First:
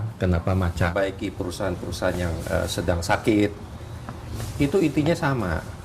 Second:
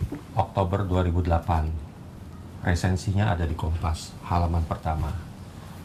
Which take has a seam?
first; 1 cut; at 0.9 s

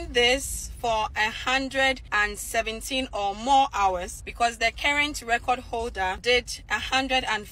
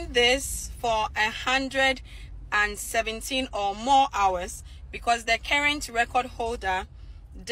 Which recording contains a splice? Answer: first; 3 cuts; at 2.0 s, 4.2 s, 6.2 s

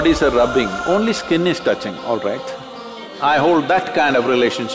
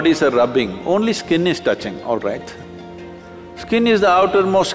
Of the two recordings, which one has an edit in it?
first; 1 cut; at 3.1 s

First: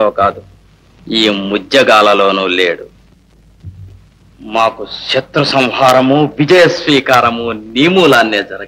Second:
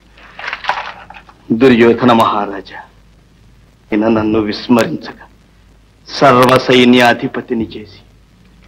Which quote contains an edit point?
second; 1 cut; at 3.9 s

